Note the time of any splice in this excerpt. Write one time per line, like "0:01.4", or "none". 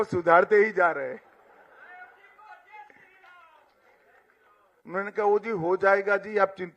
0:04.6